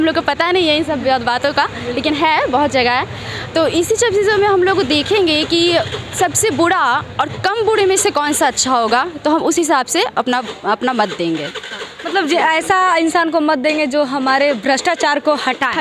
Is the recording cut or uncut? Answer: uncut